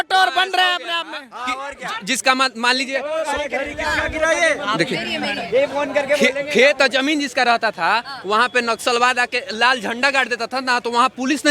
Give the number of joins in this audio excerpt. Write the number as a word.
zero